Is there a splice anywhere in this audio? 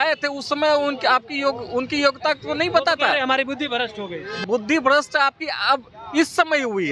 yes; 1 cut; at 4.3 s

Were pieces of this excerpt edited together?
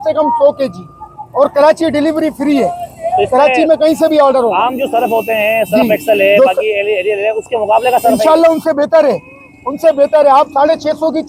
no; 0 cuts

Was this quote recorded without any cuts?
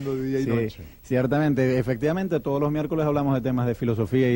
yes; 0 cuts

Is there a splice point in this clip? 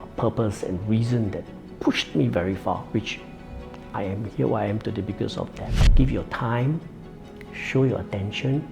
yes; 1 cut; at 5.8 s

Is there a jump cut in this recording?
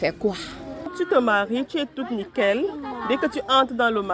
yes; 1 cut; at 0.9 s

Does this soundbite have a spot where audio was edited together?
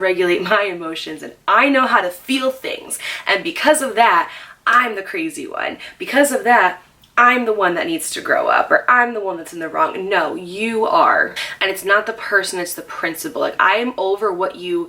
yes; 1 cut; at 11.4 s

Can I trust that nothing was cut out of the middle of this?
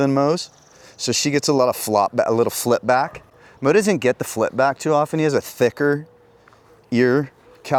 yes; 0 cuts

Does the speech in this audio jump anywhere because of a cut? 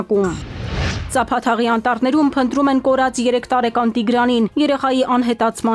yes; 1 cut; at 1.0 s

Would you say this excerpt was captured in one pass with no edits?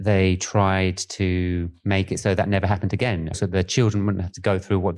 no; 2 cuts; at 1.7 s, 3.3 s

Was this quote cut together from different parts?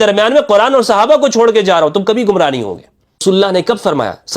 yes; 1 cut; at 3.2 s

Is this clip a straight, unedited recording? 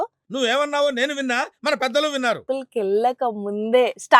no; 1 cut; at 2.4 s

